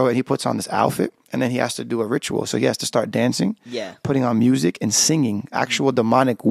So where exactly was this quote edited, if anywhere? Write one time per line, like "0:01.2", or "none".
none

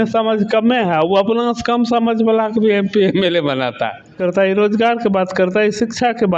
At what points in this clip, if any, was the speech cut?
0:04.1

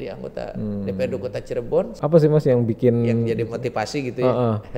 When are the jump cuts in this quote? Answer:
0:02.0

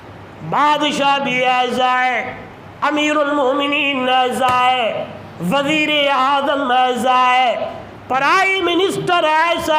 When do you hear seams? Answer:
none

